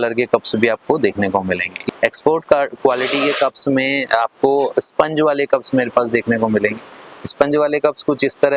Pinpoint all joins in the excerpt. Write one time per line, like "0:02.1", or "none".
0:01.8